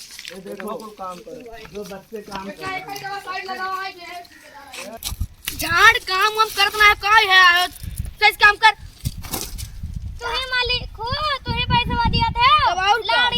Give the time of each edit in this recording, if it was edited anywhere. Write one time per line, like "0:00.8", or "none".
0:05.0